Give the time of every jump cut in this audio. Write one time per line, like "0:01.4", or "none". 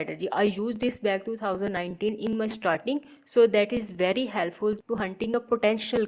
none